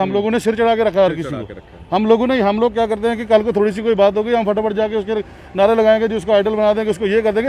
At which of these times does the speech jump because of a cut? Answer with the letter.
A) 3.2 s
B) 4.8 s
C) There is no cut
C